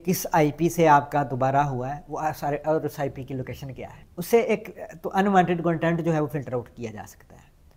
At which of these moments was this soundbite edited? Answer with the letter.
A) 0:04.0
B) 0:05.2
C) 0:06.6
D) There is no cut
A